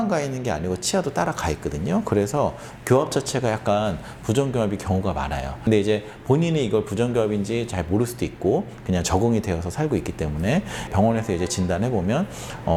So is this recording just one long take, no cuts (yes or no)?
yes